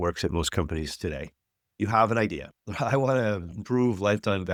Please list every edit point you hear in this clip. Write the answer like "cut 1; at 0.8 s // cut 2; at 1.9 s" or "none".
none